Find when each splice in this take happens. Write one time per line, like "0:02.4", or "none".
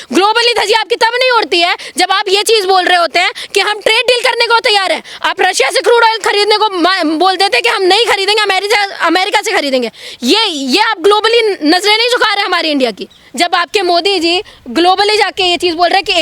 0:13.1